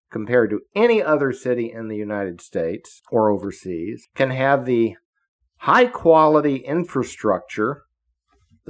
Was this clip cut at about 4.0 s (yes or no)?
yes